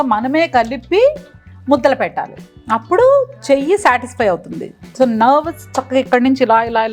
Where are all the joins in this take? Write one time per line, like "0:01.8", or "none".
none